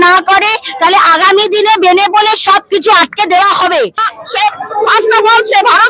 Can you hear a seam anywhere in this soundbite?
yes; 1 cut; at 4.1 s

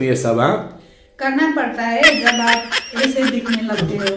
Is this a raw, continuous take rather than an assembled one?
yes; 0 cuts

